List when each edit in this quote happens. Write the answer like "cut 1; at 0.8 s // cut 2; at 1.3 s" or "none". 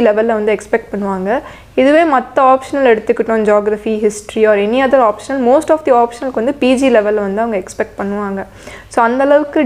none